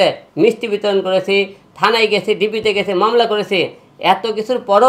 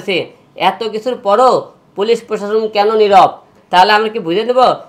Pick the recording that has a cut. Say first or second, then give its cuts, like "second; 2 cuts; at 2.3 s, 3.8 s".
second; 1 cut; at 3.5 s